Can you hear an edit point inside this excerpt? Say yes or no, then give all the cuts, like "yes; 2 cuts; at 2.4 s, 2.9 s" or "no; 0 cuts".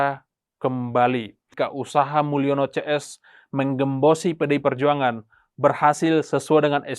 yes; 1 cut; at 1.5 s